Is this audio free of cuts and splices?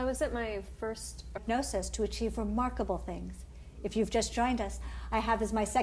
yes; 0 cuts

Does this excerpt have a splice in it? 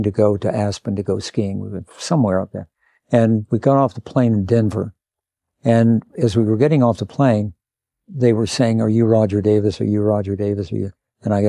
no; 0 cuts

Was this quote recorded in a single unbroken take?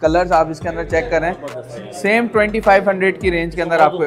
yes; 0 cuts

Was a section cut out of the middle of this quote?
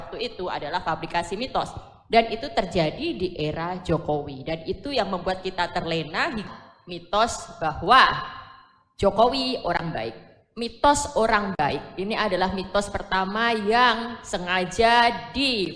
yes; 1 cut; at 6.4 s

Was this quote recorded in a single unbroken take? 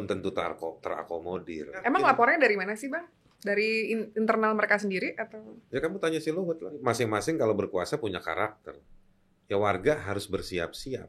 no; 2 cuts; at 1.8 s, 6.8 s

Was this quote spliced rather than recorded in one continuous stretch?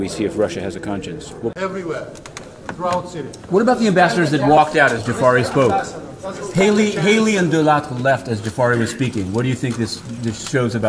yes; 1 cut; at 1.5 s

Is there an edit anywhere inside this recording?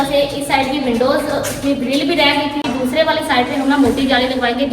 yes; 1 cut; at 2.6 s

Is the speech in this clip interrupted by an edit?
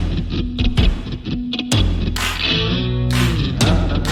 no; 0 cuts

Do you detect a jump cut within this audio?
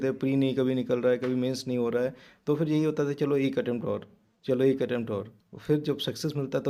no; 0 cuts

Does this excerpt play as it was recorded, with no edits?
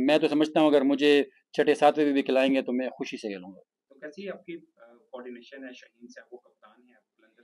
yes; 0 cuts

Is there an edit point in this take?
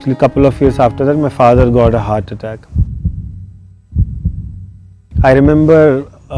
yes; 2 cuts; at 2.6 s, 5.0 s

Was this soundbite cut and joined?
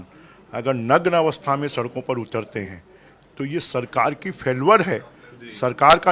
no; 0 cuts

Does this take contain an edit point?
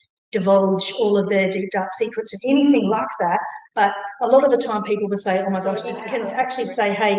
yes; 1 cut; at 6.0 s

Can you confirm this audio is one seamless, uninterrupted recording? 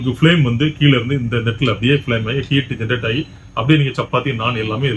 yes; 0 cuts

